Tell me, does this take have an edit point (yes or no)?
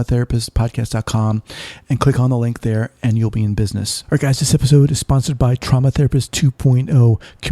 yes